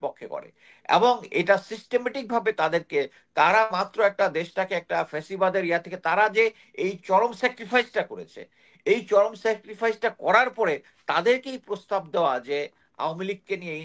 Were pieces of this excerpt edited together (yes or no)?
no